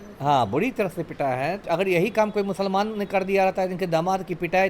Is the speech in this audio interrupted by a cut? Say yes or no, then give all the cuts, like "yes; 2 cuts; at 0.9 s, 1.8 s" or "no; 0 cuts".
yes; 1 cut; at 1.6 s